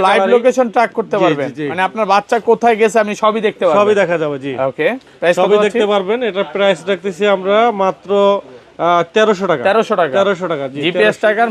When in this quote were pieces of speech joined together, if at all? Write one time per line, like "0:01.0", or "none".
none